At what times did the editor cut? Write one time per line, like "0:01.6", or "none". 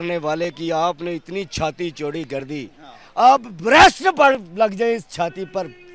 none